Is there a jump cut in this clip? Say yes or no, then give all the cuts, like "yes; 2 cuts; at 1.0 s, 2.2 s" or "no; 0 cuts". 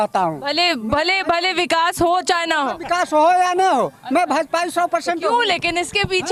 no; 0 cuts